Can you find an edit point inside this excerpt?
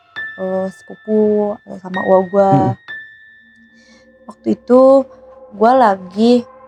no; 0 cuts

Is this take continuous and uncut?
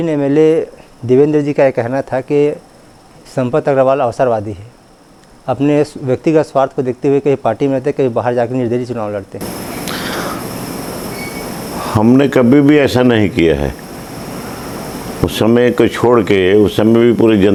yes; 0 cuts

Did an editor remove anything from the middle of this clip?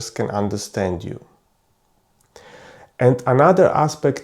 yes; 1 cut; at 2.2 s

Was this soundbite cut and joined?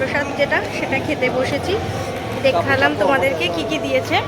no; 0 cuts

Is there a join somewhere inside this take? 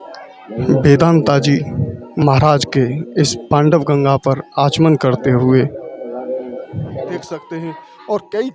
yes; 1 cut; at 7.0 s

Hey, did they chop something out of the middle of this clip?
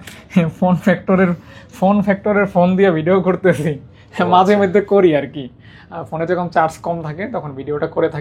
no; 0 cuts

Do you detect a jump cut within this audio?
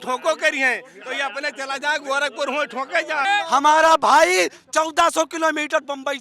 yes; 1 cut; at 3.2 s

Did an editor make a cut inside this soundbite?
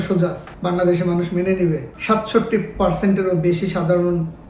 no; 0 cuts

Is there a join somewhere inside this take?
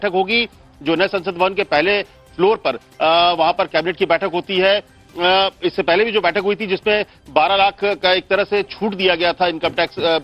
no; 0 cuts

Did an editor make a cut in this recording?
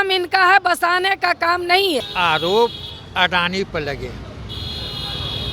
yes; 1 cut; at 2.1 s

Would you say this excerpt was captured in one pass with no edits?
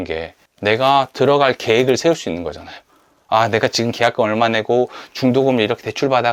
yes; 0 cuts

